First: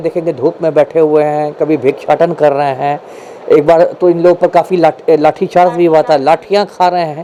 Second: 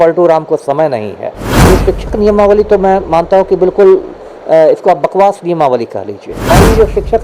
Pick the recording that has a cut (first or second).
second